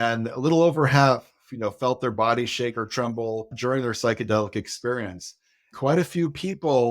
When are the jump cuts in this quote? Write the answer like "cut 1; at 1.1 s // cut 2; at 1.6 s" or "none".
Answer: cut 1; at 3.5 s // cut 2; at 5.7 s